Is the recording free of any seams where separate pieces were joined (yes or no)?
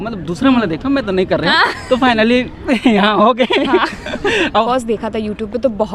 no